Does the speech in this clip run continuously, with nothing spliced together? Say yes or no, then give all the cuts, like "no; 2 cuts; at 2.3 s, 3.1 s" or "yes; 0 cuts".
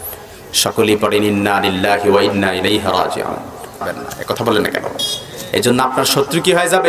no; 1 cut; at 3.9 s